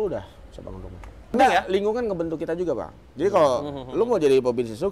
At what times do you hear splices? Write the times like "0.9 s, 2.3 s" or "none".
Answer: 1.4 s